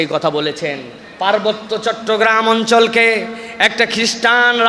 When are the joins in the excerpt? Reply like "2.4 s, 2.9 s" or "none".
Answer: 1.0 s

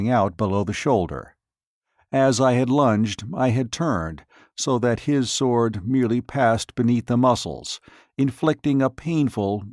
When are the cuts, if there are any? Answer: none

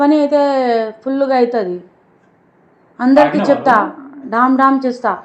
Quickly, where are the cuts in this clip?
none

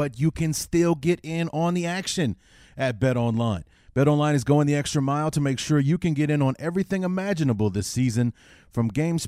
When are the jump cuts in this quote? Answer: none

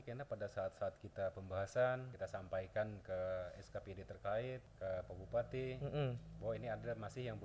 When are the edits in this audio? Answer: 2.1 s, 4.7 s

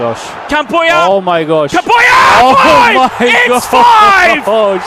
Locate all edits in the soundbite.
none

